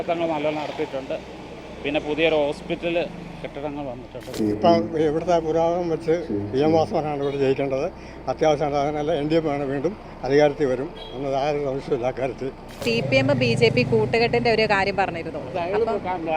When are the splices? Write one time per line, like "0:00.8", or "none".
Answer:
0:04.3
0:12.8